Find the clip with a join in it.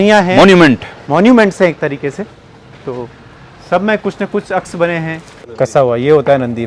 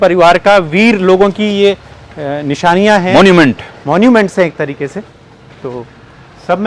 first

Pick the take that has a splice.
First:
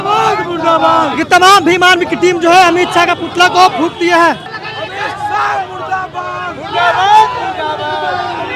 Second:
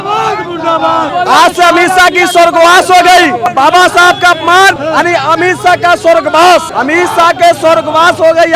second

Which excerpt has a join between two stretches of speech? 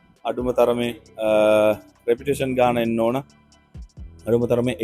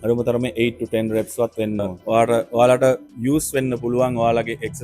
second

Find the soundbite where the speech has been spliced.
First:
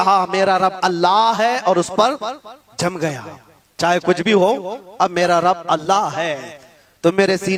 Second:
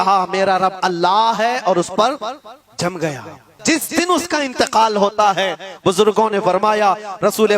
second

